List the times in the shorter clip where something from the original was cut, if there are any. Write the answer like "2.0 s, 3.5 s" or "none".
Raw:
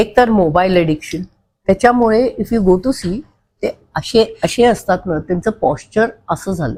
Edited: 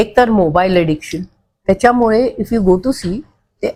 none